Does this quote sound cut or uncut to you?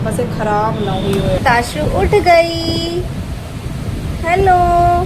cut